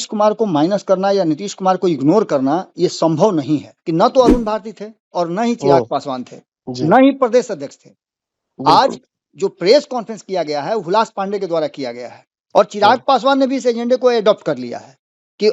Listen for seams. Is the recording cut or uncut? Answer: cut